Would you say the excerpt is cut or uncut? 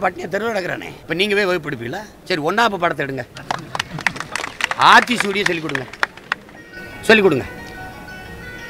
cut